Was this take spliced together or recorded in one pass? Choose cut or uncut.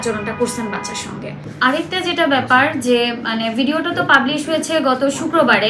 uncut